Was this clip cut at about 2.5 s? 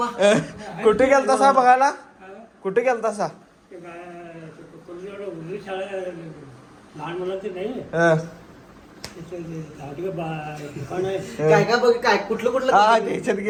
no; 0 cuts

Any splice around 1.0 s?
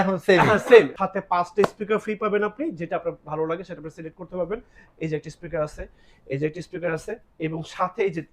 yes; 1 cut; at 1.0 s

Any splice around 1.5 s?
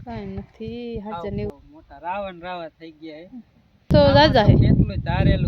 yes; 2 cuts; at 1.5 s, 3.9 s

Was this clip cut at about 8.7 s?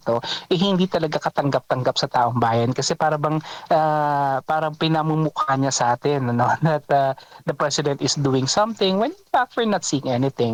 no; 0 cuts

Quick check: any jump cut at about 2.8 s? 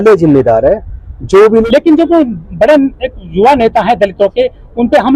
no; 1 cut; at 1.6 s

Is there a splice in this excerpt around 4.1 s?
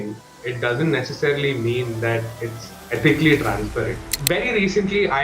yes; 1 cut; at 4.1 s

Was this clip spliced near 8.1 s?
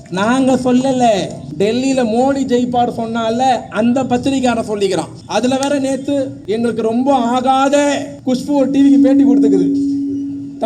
yes; 4 cuts; at 1.4 s, 5.2 s, 6.4 s, 8.1 s

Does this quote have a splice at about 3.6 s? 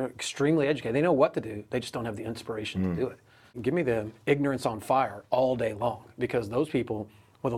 yes; 1 cut; at 3.6 s

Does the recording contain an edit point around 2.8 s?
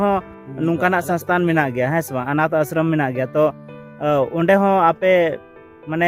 no; 0 cuts

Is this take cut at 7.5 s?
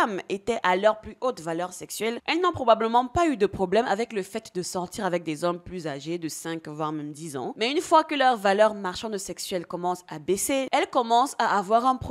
yes; 3 cuts; at 2.2 s, 7.5 s, 10.7 s

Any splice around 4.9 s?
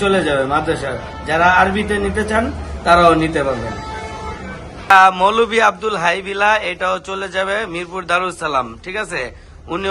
yes; 1 cut; at 4.9 s

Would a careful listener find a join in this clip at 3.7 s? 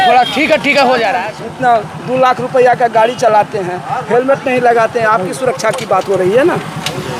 no; 1 cut; at 1.2 s

